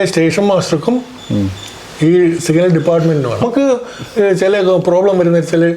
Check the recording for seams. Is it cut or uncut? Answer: cut